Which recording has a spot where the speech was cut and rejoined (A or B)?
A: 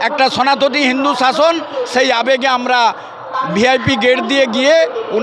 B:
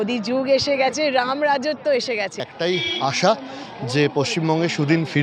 B